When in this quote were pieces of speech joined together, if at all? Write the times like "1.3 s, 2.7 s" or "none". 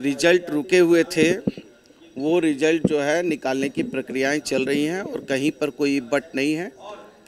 none